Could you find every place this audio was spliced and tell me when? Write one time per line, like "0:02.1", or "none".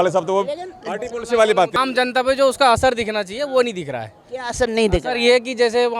none